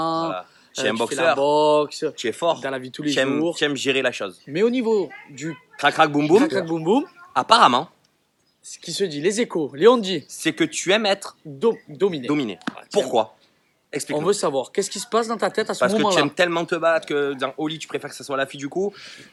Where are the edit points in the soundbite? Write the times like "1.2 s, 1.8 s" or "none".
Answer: none